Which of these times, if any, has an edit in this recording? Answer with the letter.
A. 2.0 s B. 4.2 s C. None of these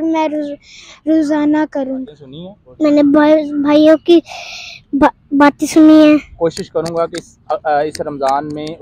A